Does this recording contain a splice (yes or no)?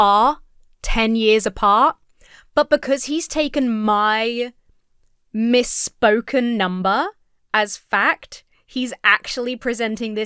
no